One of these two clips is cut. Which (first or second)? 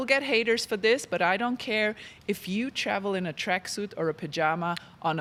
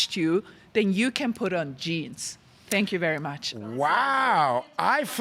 second